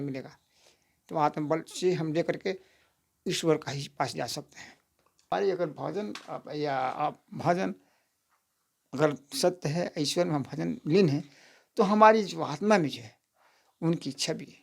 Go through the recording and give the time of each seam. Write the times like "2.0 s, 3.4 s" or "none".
5.3 s